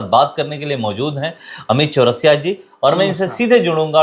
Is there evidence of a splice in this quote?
no; 0 cuts

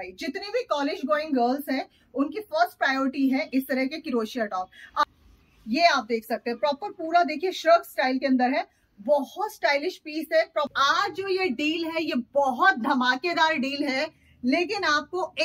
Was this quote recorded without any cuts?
no; 2 cuts; at 5.0 s, 10.7 s

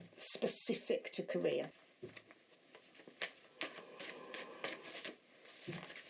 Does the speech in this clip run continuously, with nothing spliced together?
no; 1 cut; at 1.7 s

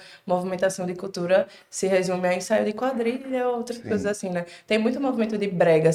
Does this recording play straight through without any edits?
yes; 0 cuts

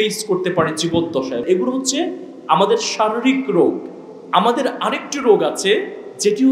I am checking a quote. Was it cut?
yes; 1 cut; at 1.4 s

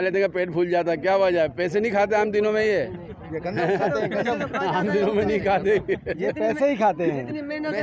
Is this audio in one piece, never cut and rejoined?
yes; 0 cuts

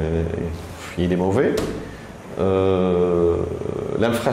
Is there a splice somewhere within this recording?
no; 0 cuts

